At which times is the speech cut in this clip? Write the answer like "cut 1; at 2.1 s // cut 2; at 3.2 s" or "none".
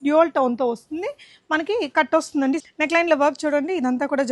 cut 1; at 2.7 s